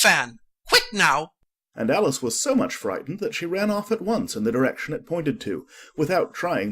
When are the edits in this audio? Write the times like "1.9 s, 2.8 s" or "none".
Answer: none